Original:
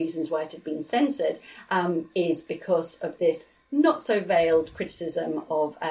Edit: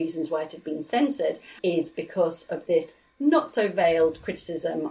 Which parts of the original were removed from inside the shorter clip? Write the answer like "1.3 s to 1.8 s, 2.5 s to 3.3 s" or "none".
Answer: 1.6 s to 2.1 s